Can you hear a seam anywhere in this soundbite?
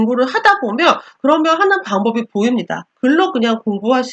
yes; 1 cut; at 2.8 s

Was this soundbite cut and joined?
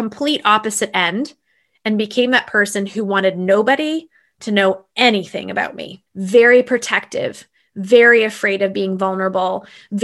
no; 0 cuts

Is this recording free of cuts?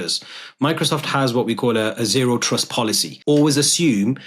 no; 1 cut; at 3.1 s

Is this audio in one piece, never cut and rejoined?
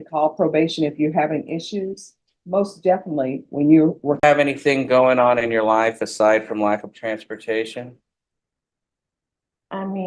no; 1 cut; at 4.2 s

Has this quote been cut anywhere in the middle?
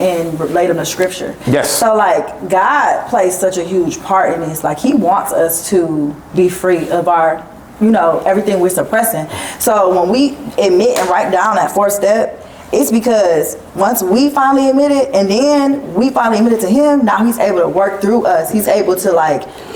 no; 0 cuts

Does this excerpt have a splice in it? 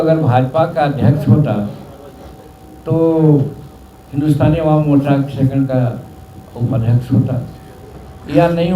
no; 0 cuts

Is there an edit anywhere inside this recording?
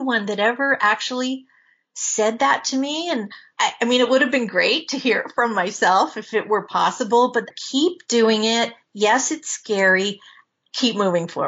yes; 2 cuts; at 3.4 s, 7.5 s

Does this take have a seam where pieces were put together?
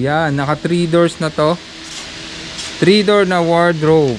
no; 0 cuts

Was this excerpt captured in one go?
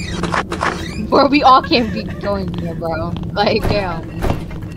yes; 0 cuts

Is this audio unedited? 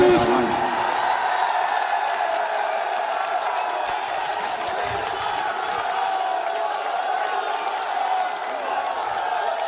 yes; 0 cuts

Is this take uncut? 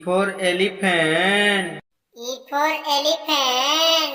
yes; 0 cuts

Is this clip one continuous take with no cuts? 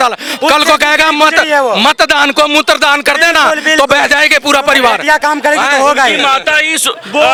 yes; 0 cuts

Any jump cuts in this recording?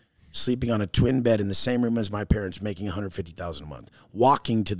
no; 0 cuts

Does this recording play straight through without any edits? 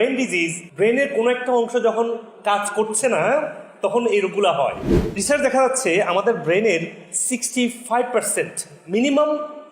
no; 1 cut; at 4.9 s

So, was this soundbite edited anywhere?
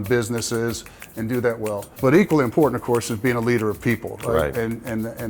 yes; 1 cut; at 1.9 s

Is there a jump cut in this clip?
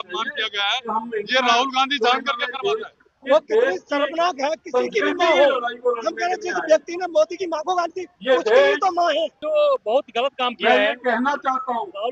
yes; 2 cuts; at 3.0 s, 9.4 s

